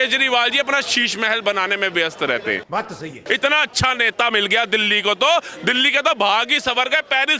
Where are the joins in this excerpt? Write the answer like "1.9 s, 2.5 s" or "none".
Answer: 3.1 s